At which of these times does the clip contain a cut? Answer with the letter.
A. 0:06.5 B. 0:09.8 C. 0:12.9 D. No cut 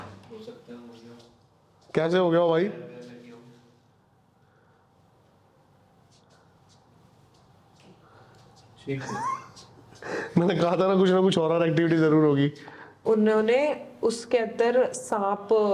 C